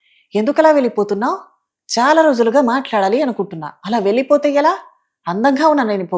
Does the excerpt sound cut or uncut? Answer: uncut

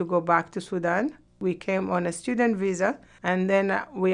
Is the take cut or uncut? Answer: cut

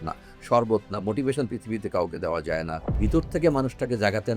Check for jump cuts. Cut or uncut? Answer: cut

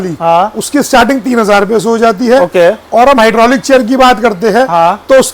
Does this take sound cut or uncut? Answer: uncut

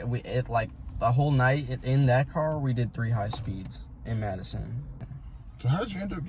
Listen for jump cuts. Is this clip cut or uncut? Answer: cut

